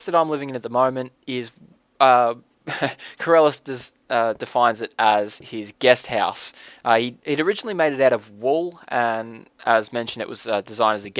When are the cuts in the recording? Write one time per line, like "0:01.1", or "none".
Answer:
0:06.6